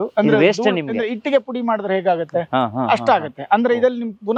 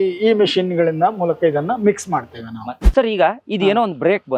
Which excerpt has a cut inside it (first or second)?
second